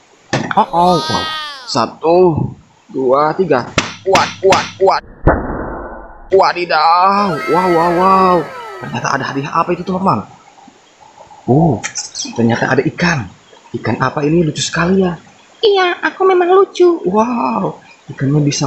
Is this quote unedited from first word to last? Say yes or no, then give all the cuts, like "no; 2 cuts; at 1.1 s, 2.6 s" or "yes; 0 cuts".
yes; 0 cuts